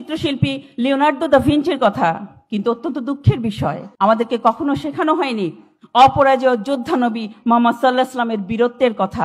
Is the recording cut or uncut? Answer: cut